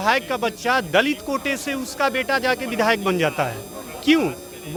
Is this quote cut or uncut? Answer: uncut